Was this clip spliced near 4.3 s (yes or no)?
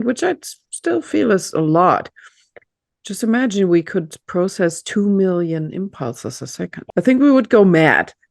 no